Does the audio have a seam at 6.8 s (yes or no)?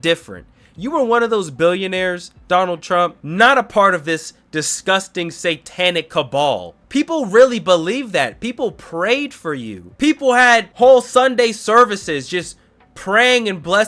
yes